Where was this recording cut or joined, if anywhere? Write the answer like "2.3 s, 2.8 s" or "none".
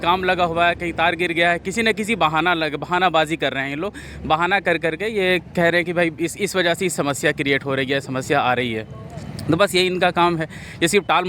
none